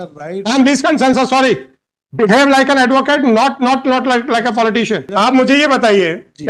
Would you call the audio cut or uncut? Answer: cut